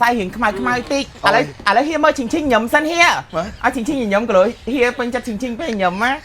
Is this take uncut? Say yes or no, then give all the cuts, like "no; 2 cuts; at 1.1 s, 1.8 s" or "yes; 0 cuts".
yes; 0 cuts